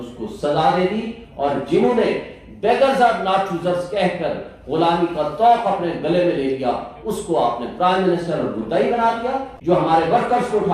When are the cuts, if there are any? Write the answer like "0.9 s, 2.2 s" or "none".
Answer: 9.5 s